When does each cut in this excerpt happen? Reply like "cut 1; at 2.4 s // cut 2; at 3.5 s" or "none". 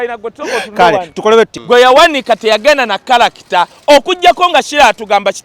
cut 1; at 1.6 s